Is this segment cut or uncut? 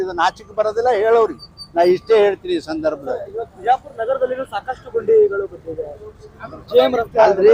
uncut